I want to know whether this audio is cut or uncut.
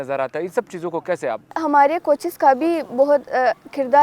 cut